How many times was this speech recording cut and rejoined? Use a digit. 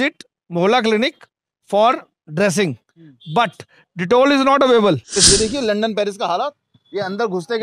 1